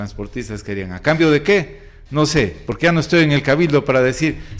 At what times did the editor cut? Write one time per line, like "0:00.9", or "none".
none